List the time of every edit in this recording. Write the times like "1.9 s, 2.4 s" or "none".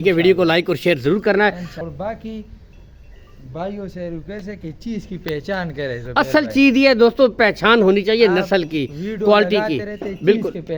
1.7 s